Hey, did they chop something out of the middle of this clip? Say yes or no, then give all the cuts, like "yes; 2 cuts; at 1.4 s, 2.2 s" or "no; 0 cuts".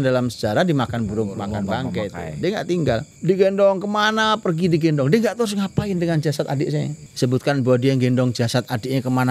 yes; 2 cuts; at 3.1 s, 7.0 s